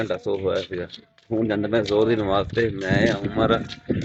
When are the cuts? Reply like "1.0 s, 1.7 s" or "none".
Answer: none